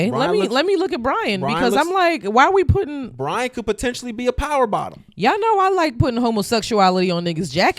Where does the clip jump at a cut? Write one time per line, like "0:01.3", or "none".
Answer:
none